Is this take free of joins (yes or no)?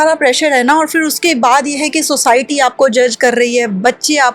yes